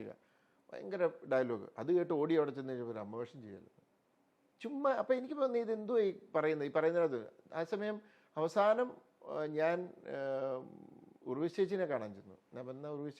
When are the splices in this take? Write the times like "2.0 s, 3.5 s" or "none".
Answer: none